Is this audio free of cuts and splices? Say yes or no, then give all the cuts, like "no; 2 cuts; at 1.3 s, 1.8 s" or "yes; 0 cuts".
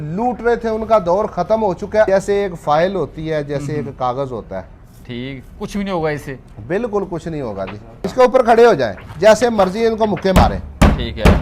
no; 2 cuts; at 2.1 s, 8.0 s